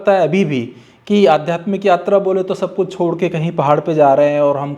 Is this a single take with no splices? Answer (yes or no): yes